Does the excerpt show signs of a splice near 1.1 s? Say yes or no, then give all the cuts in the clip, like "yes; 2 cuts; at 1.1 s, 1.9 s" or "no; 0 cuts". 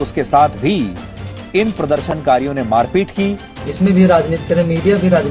no; 1 cut; at 3.5 s